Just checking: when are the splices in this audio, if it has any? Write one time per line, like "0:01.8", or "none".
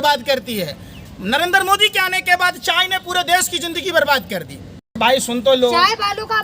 0:05.0